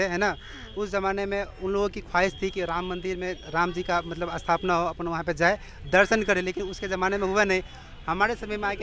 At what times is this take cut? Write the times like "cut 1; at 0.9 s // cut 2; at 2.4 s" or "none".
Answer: none

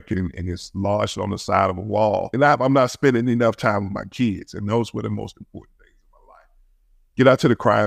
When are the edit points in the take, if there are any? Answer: cut 1; at 2.3 s

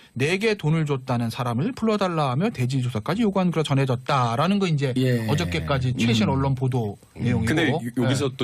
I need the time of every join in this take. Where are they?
cut 1; at 6.7 s

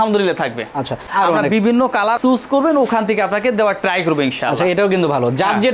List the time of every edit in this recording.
cut 1; at 1.1 s // cut 2; at 2.2 s

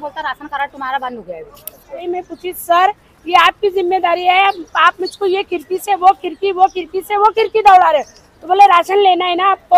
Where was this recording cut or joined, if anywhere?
cut 1; at 2.0 s

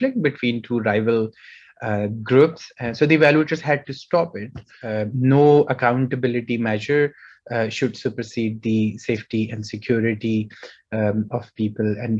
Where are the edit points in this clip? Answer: cut 1; at 4.8 s

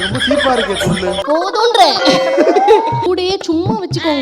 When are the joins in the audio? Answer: cut 1; at 3.0 s

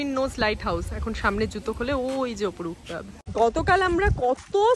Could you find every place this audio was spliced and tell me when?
cut 1; at 3.1 s

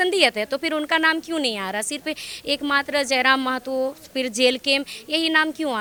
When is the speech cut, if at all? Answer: none

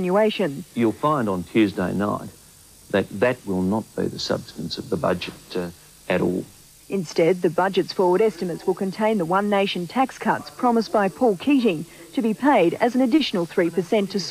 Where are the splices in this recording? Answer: none

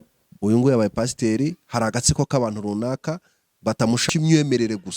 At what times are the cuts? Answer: cut 1; at 4.0 s

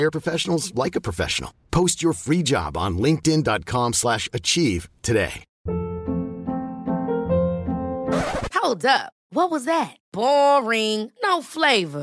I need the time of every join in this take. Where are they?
cut 1; at 5.5 s

